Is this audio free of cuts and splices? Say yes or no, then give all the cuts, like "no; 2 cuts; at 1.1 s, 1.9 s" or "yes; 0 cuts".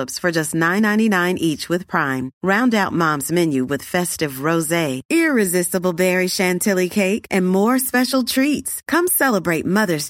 yes; 0 cuts